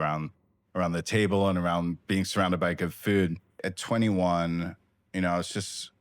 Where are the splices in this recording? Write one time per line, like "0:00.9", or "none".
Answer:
0:03.7